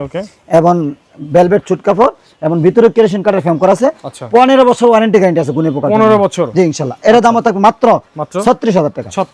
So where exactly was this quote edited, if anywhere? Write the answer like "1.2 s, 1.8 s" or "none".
none